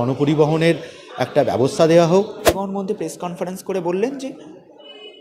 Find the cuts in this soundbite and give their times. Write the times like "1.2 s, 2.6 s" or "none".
2.6 s

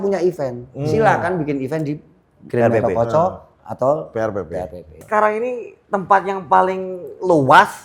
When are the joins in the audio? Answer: 5.0 s

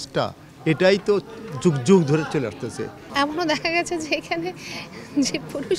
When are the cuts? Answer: 3.0 s

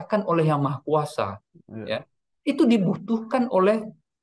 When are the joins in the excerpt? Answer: none

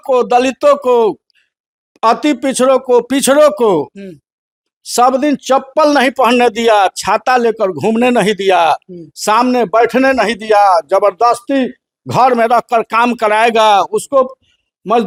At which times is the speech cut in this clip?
none

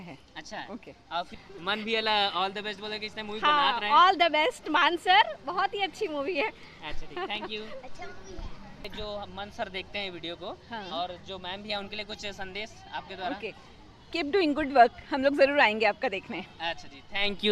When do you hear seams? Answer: 1.4 s, 8.9 s

